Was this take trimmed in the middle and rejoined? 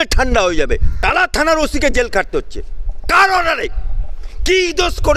yes; 1 cut; at 0.9 s

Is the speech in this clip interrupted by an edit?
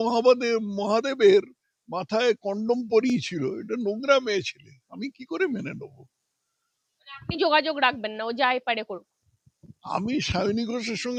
no; 0 cuts

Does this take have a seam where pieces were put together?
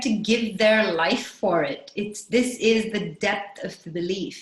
no; 0 cuts

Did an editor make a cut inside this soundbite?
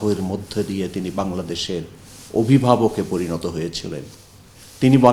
no; 0 cuts

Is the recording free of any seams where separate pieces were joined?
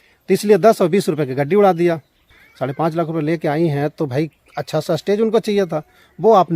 no; 1 cut; at 2.1 s

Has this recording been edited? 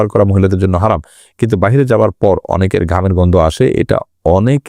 no; 0 cuts

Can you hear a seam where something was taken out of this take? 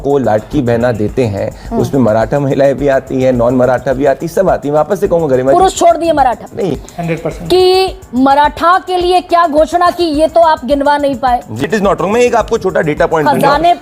yes; 2 cuts; at 6.8 s, 11.6 s

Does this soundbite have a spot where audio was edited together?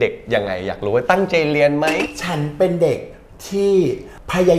yes; 1 cut; at 2.0 s

